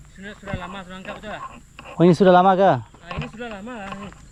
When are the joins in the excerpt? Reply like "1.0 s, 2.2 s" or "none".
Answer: none